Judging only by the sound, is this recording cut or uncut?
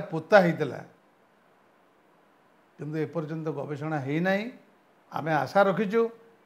uncut